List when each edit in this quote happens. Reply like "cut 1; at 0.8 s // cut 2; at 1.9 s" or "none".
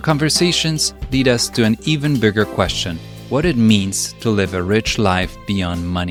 none